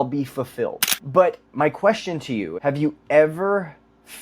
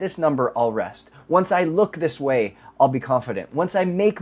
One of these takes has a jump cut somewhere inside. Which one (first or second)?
first